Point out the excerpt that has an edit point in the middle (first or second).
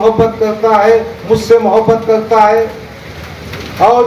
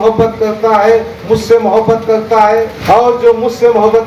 second